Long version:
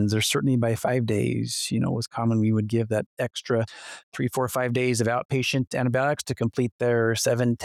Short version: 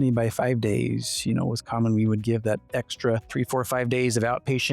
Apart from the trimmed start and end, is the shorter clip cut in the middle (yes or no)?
yes